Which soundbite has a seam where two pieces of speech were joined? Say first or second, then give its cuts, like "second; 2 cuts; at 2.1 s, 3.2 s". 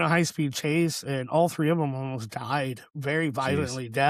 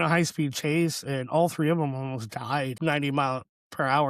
second; 1 cut; at 2.7 s